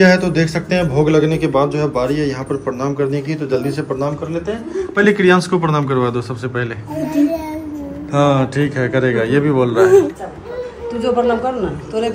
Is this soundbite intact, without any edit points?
yes; 0 cuts

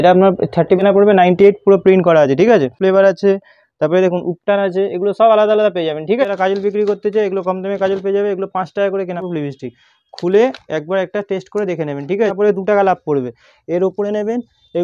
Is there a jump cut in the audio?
yes; 5 cuts; at 0.8 s, 2.8 s, 6.2 s, 9.2 s, 12.3 s

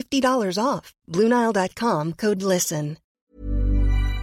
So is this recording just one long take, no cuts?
no; 1 cut; at 3.2 s

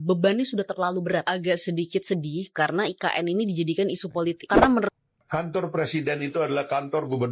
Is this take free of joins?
no; 1 cut; at 4.9 s

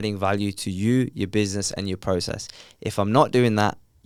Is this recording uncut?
yes; 0 cuts

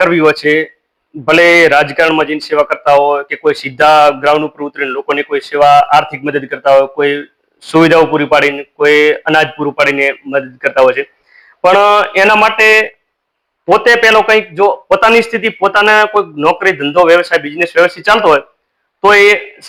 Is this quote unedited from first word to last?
yes; 0 cuts

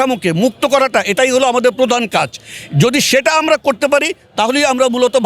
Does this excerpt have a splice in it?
no; 0 cuts

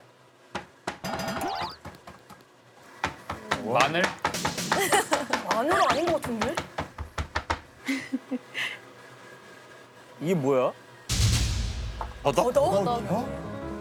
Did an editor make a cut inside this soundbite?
no; 0 cuts

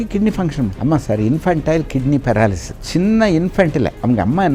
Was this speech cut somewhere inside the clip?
no; 0 cuts

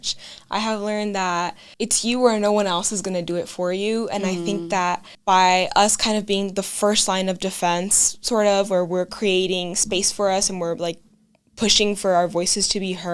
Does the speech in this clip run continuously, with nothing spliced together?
no; 2 cuts; at 1.6 s, 5.1 s

